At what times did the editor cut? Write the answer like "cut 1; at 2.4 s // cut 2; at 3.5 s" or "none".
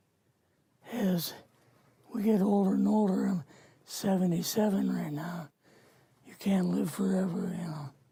none